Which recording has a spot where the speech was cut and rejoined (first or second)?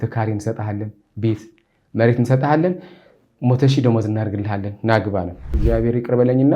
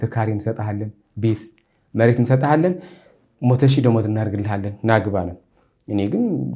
first